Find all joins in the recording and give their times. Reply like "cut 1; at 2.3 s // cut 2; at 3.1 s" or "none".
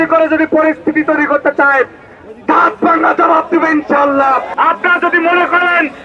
cut 1; at 4.5 s